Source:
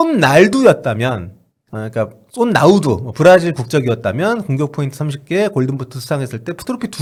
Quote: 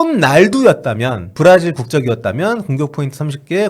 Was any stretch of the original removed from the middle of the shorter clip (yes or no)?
yes